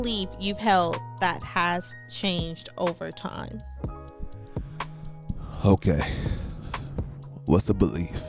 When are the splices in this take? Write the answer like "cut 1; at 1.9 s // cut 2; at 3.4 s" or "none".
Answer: none